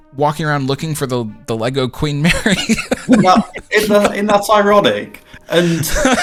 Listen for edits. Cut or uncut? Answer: uncut